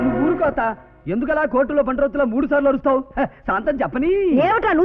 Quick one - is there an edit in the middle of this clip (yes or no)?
no